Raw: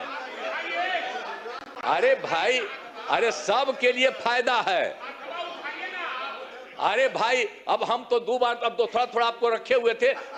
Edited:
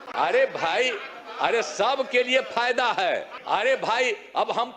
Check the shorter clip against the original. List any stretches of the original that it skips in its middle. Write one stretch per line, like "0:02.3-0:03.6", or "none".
0:05.0-0:06.7